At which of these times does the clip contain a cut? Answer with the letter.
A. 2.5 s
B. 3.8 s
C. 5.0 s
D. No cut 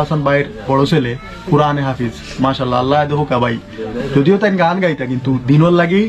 D